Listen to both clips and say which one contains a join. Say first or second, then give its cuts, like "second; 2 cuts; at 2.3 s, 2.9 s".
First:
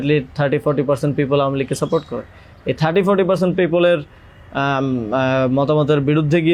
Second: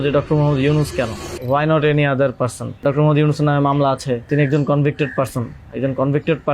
second; 3 cuts; at 1.3 s, 2.8 s, 4.3 s